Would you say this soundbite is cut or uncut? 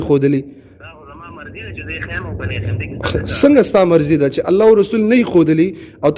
uncut